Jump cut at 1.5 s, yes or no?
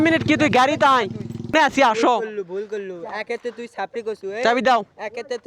yes